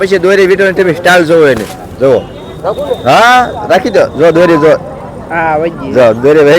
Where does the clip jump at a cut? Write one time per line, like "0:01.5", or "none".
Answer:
none

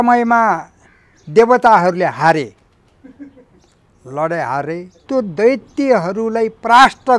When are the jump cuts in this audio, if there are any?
0:04.9

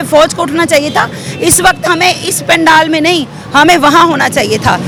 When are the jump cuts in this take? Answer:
none

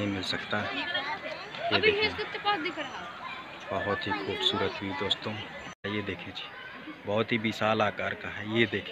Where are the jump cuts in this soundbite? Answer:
0:05.8

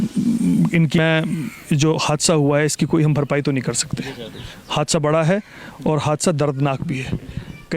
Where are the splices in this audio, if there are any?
0:01.0

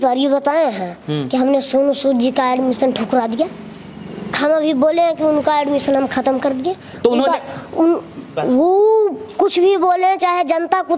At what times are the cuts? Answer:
none

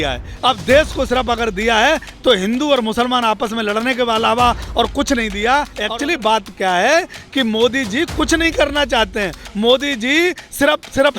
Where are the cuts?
0:05.8

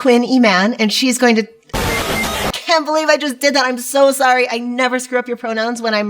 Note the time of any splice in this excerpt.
none

